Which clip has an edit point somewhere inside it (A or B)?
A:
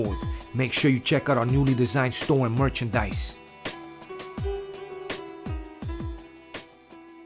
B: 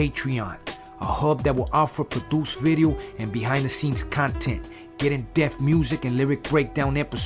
A